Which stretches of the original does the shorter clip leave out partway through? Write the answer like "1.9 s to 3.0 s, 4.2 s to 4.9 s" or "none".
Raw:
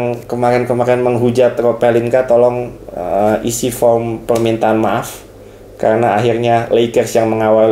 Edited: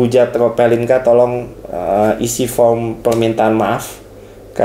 none